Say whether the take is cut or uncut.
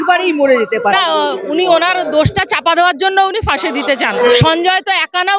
cut